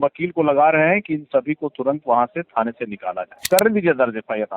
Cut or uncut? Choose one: cut